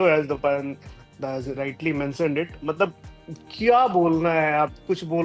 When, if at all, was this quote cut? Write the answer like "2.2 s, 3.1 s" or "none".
none